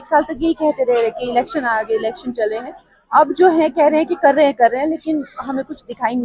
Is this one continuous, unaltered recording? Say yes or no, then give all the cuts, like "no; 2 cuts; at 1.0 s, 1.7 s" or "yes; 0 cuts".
yes; 0 cuts